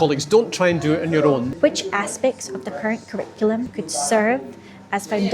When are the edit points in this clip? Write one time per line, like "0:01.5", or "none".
0:01.5
0:03.8